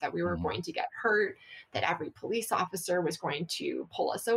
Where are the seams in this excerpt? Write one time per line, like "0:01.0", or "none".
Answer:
none